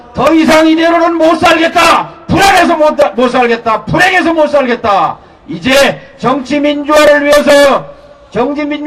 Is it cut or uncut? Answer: uncut